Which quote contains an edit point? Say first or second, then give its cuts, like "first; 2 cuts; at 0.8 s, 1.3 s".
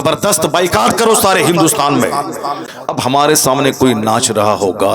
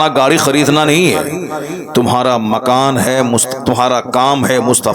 first; 1 cut; at 2.8 s